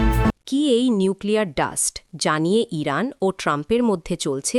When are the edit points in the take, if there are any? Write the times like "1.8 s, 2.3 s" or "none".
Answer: none